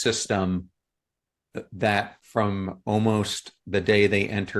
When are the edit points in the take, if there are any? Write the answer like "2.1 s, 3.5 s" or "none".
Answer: 2.2 s

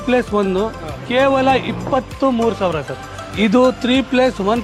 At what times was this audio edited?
none

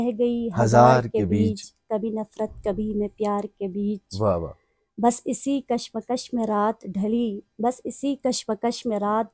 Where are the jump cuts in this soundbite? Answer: none

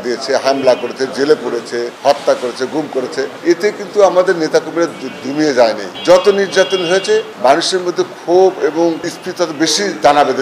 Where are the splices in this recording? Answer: 1.9 s, 3.3 s, 5.9 s, 7.3 s, 9.1 s

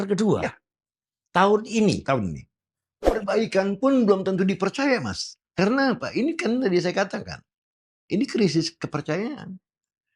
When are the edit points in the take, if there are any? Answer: 3.2 s

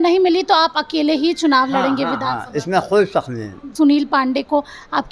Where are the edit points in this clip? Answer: 3.7 s

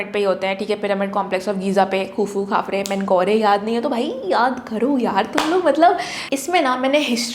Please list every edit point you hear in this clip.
6.2 s

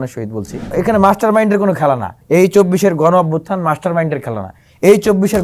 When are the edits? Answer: 0.7 s, 2.1 s

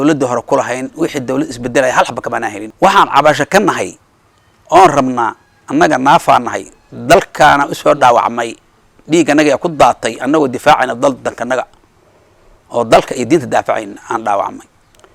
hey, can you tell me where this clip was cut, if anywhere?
2.6 s

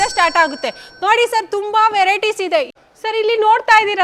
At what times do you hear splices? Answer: 2.7 s

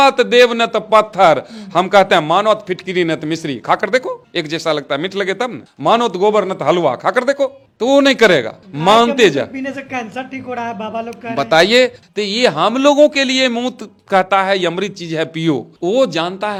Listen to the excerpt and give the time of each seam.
none

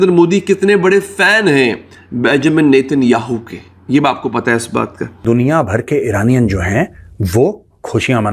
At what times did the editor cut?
5.2 s

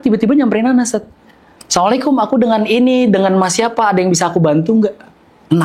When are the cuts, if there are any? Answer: none

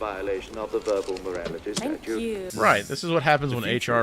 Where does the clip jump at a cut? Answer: 2.5 s

